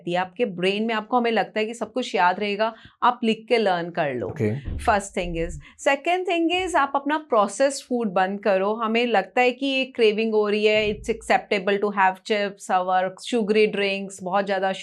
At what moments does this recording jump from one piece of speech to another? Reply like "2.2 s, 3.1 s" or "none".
none